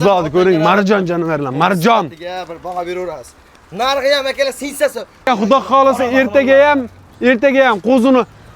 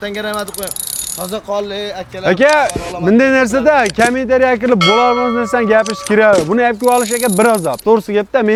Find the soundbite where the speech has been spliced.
first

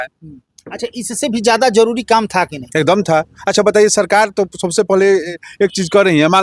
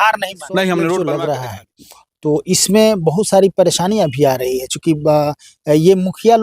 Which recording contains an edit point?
second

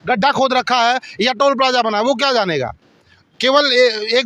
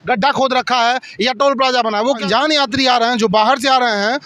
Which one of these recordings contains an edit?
second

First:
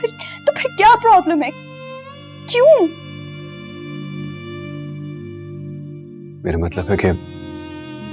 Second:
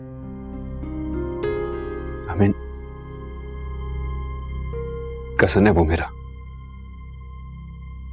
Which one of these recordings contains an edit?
first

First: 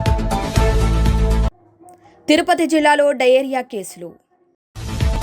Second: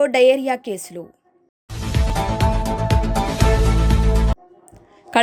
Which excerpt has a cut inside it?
first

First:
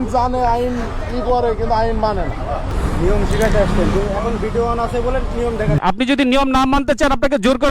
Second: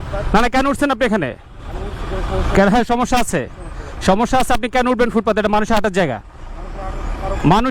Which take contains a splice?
first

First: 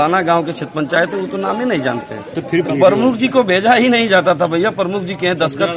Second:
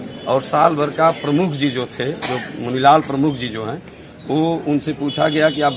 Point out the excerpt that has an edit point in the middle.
first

